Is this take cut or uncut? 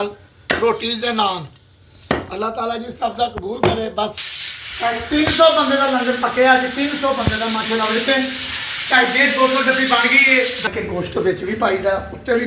cut